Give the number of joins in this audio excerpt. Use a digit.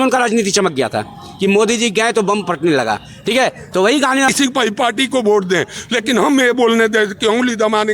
1